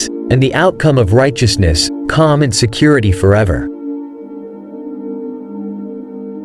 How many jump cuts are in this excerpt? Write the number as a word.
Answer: one